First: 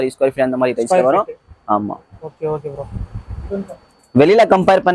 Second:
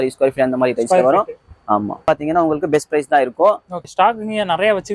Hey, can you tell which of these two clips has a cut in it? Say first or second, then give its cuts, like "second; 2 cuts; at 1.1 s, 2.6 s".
second; 2 cuts; at 2.0 s, 3.8 s